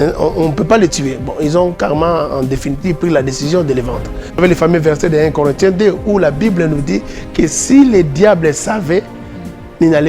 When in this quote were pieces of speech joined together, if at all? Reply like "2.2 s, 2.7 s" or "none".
4.4 s